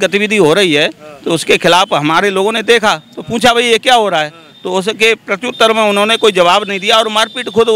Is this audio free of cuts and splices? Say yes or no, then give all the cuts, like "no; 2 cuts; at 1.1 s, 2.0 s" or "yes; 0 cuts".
yes; 0 cuts